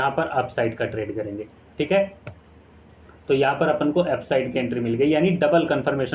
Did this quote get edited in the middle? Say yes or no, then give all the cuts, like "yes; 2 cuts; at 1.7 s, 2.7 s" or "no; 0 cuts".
no; 0 cuts